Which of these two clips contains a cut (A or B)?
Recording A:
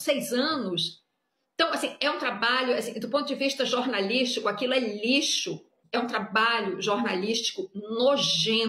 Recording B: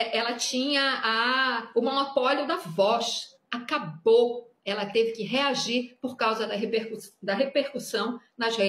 A